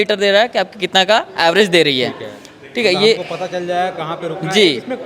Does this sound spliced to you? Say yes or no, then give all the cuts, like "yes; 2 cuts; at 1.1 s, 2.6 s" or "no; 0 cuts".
no; 0 cuts